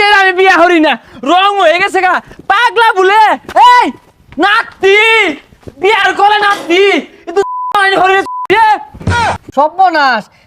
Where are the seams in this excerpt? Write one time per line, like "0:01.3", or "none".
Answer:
0:09.2